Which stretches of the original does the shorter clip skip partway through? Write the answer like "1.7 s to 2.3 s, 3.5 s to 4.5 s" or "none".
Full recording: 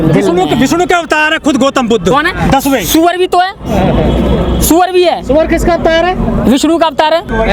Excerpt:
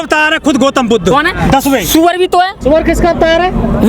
3.6 s to 5.2 s

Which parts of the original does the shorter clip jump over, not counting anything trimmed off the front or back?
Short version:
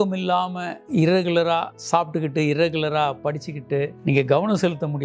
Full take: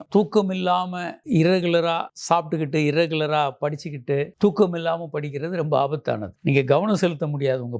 4.3 s to 6.3 s

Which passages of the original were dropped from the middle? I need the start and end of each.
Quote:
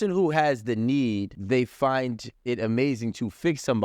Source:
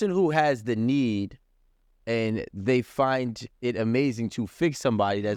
1.4 s to 2.5 s

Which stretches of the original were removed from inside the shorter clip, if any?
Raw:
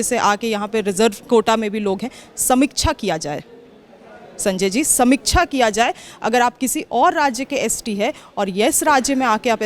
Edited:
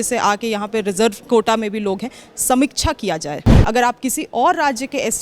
3.5 s to 6.1 s

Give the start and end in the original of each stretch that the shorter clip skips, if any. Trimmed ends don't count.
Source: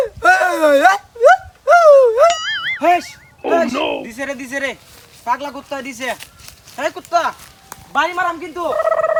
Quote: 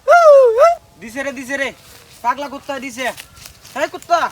2.7 s to 4.1 s

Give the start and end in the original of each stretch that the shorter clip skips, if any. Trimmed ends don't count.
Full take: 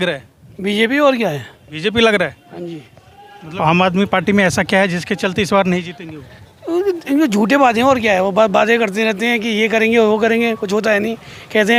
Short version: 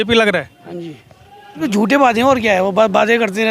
3.5 s to 7.2 s

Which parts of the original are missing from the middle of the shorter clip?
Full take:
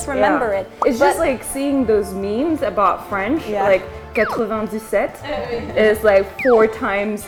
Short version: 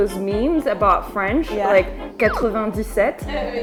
none

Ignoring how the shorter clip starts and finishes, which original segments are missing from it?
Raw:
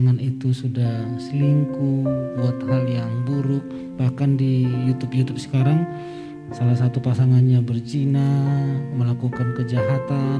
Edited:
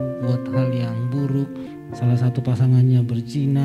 3.8 s to 6.2 s

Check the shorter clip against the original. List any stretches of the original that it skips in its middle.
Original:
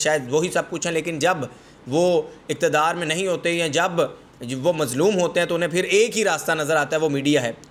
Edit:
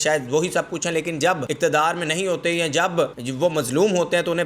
1.5 s to 2.5 s, 4.2 s to 4.5 s

